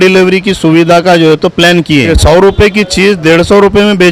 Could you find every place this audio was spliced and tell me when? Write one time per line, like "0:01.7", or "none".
0:02.1